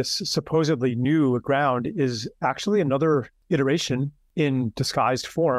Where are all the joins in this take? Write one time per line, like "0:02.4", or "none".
0:03.7